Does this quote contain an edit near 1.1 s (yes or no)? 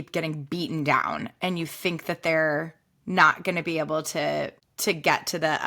no